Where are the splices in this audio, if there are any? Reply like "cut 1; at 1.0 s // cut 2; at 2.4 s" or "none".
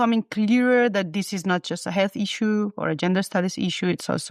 none